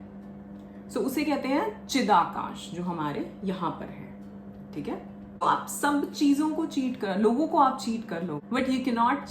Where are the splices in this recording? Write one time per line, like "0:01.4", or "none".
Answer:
0:05.4
0:08.4